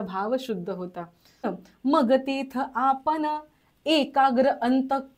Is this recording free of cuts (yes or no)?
no